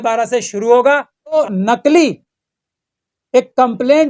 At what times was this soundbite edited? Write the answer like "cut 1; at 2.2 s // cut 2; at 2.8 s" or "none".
cut 1; at 1.4 s